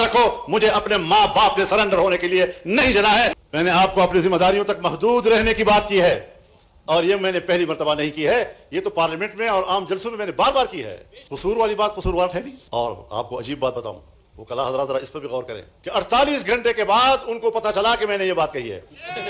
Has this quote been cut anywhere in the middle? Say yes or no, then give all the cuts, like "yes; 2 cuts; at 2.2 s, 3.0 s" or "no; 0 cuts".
no; 0 cuts